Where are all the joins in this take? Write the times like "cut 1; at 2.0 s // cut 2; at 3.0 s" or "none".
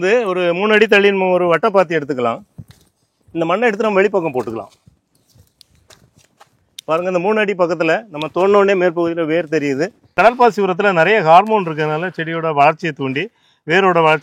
cut 1; at 10.0 s